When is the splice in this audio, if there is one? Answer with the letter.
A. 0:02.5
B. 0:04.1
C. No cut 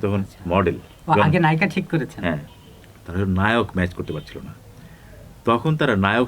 A